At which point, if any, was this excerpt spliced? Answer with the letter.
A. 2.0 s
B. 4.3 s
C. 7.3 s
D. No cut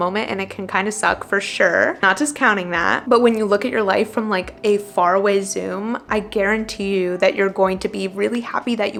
D